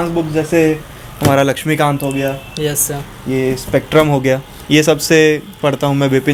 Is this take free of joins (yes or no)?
yes